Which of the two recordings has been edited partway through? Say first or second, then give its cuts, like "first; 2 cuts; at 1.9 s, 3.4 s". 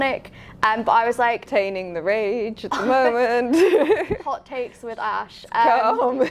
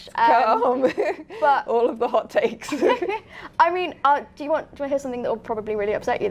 first; 1 cut; at 1.4 s